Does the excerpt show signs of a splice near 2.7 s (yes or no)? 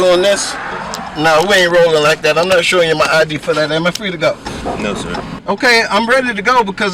no